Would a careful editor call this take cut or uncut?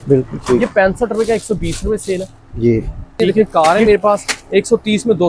cut